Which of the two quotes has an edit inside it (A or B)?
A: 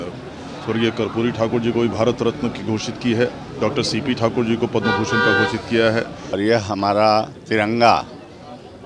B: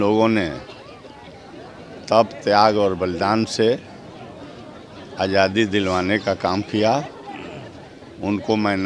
A